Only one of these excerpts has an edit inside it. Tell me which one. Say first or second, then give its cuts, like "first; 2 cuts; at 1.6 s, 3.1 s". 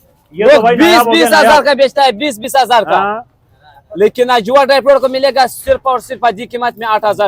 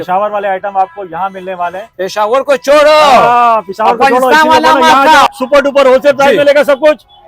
second; 1 cut; at 5.3 s